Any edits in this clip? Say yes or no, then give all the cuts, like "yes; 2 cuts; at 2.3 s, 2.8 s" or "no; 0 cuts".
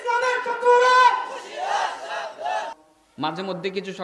yes; 1 cut; at 2.8 s